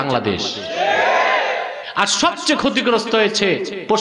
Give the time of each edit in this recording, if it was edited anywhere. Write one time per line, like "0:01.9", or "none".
0:01.8